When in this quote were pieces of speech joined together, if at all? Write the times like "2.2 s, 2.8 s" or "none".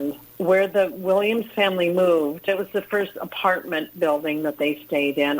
2.5 s